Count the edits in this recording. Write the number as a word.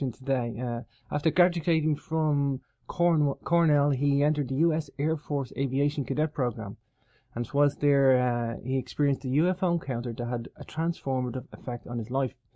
zero